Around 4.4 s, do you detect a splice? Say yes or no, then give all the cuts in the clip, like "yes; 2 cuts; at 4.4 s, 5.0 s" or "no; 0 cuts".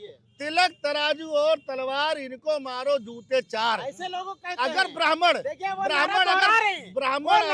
no; 0 cuts